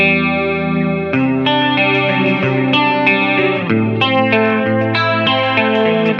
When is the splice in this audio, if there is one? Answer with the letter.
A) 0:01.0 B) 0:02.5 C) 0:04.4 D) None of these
D